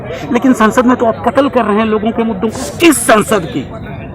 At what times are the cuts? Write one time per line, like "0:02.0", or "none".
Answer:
0:02.6